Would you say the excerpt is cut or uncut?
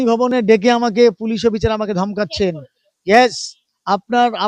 uncut